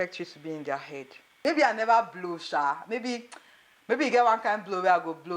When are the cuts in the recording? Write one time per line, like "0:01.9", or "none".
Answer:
0:01.4